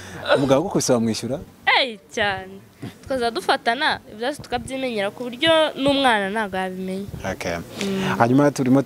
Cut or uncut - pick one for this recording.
uncut